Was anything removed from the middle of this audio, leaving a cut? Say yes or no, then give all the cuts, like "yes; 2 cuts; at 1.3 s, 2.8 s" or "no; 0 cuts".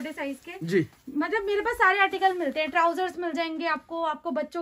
no; 0 cuts